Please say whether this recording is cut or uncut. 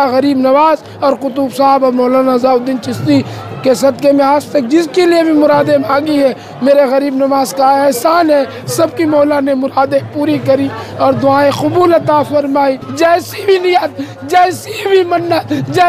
cut